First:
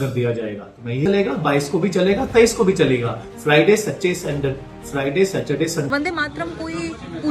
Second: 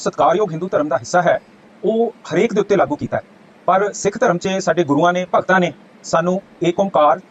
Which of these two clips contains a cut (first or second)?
first